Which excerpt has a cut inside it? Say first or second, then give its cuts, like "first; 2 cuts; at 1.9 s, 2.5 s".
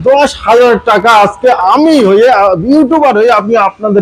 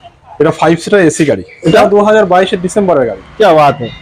second; 1 cut; at 1.7 s